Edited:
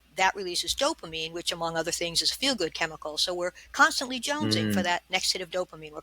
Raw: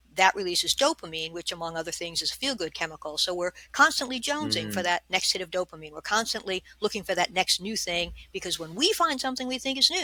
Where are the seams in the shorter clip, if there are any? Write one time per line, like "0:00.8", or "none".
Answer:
none